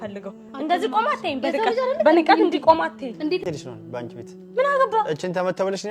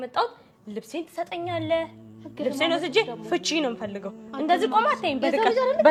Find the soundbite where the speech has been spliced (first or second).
first